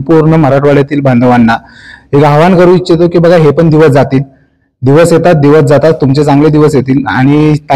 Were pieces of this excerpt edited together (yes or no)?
no